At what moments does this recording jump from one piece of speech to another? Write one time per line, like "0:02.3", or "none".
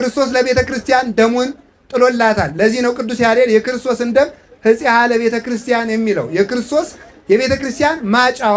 none